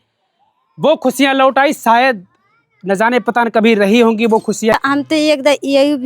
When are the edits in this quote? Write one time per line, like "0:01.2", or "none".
0:04.7